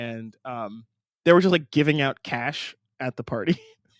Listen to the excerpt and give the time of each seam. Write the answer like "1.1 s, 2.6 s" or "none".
none